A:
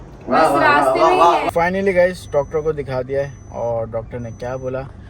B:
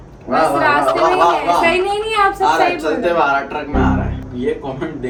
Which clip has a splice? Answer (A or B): A